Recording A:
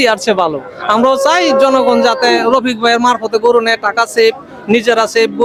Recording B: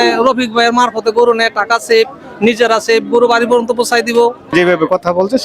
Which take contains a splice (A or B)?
B